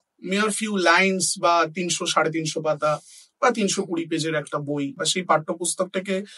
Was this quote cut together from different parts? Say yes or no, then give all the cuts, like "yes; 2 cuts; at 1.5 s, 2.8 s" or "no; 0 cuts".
yes; 1 cut; at 5.0 s